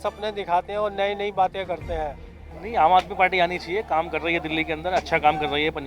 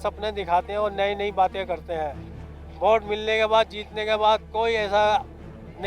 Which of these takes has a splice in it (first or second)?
first